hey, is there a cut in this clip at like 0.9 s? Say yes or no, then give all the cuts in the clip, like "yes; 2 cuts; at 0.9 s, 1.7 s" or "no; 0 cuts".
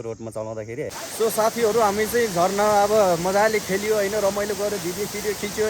yes; 1 cut; at 0.9 s